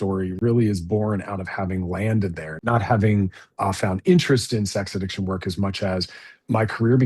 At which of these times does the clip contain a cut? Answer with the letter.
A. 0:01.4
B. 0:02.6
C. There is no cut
B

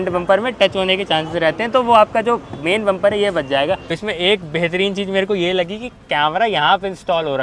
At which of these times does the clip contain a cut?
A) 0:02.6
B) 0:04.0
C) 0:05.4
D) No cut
B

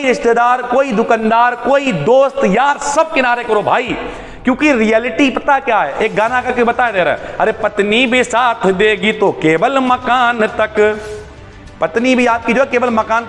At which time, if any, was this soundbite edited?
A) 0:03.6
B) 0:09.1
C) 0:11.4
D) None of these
D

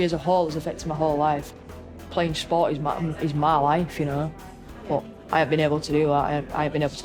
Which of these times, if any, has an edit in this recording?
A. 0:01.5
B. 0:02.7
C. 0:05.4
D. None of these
A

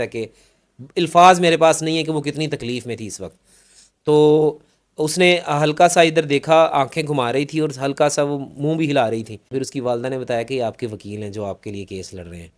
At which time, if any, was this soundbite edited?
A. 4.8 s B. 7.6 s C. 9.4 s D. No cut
C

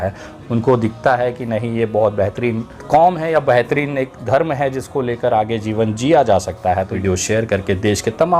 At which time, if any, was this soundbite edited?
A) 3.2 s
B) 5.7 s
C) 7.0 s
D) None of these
C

